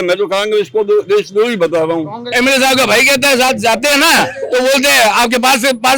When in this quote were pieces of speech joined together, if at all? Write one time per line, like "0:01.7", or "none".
0:02.3